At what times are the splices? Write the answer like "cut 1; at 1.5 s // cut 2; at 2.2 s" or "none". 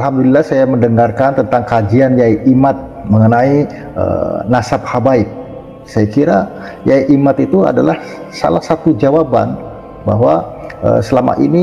none